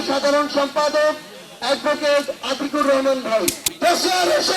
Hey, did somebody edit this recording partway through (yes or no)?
yes